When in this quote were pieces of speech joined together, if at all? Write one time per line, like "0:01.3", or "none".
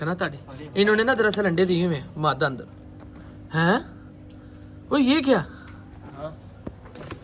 none